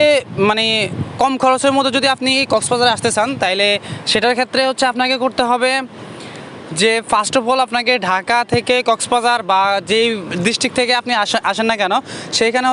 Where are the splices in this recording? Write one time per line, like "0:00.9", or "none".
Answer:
none